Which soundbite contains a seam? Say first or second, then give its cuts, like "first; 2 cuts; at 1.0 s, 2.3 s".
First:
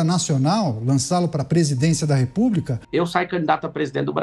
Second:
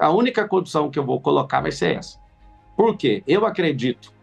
first; 1 cut; at 2.8 s